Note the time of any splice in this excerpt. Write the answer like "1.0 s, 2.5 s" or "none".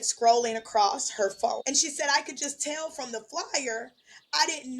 1.6 s

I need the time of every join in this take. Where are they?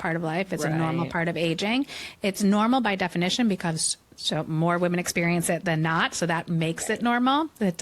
none

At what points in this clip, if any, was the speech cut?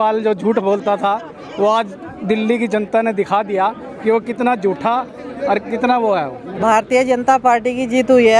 6.6 s

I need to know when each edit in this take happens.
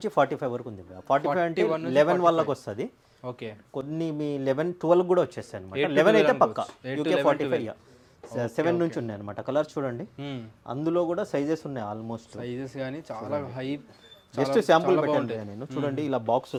none

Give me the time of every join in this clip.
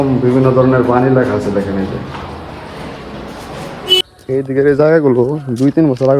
4.0 s

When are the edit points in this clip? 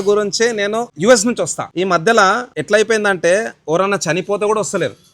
0.9 s, 1.6 s, 2.5 s

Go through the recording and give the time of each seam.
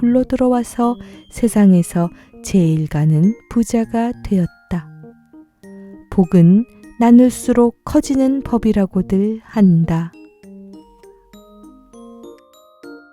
10.1 s

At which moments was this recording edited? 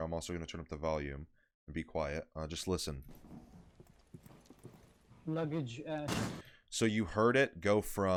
none

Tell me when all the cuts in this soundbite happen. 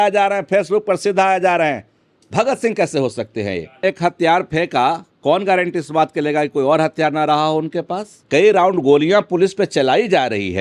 3.8 s, 8.1 s

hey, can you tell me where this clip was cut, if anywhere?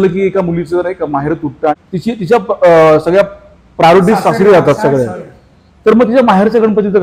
1.8 s

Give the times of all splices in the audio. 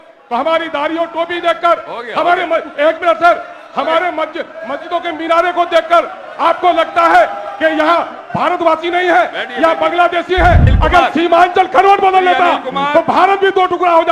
10.7 s

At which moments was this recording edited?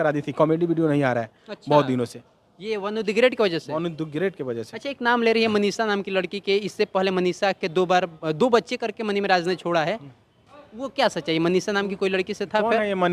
none

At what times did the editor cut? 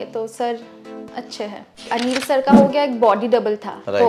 1.9 s

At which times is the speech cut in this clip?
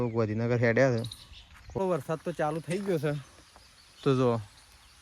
1.8 s

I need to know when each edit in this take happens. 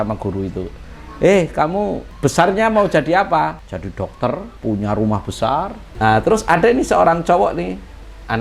2.0 s, 3.7 s, 4.5 s, 5.8 s

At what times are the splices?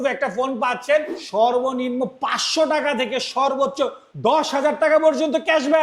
1.2 s, 4.0 s

